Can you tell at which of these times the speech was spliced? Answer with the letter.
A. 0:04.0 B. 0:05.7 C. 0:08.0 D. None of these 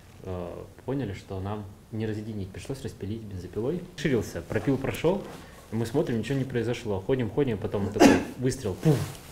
A